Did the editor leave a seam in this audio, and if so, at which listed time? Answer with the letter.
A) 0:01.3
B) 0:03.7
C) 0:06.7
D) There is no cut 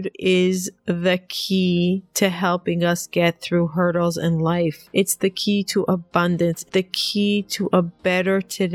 C